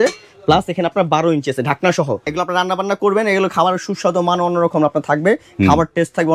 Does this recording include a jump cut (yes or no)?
yes